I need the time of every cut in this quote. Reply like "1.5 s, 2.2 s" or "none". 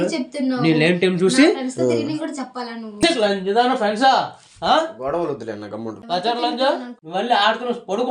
5.9 s, 6.9 s